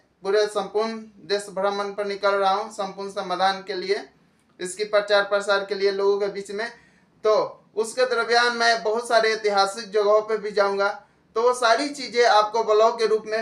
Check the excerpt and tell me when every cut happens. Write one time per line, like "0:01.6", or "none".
none